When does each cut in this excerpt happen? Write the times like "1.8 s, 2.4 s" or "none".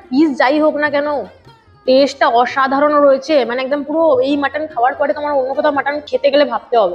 6.1 s